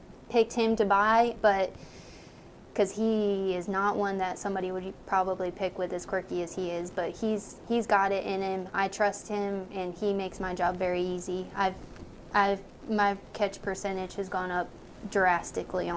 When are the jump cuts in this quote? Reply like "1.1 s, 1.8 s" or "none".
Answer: none